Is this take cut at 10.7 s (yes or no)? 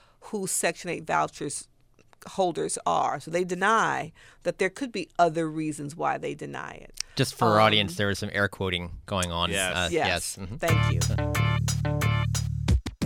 yes